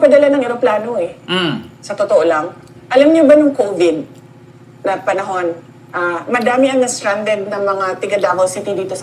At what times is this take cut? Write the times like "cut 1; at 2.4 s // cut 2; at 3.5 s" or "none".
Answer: cut 1; at 7.0 s